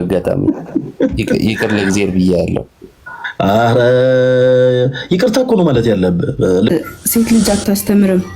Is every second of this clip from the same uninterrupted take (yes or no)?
no